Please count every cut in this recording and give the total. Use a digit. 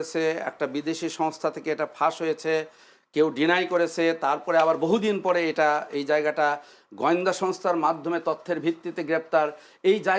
0